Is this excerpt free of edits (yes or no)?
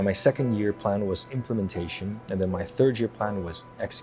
yes